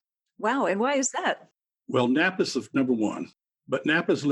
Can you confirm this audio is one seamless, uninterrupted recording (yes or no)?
no